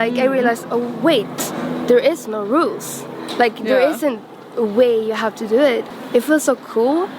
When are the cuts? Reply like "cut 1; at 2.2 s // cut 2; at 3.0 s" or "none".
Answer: cut 1; at 5.9 s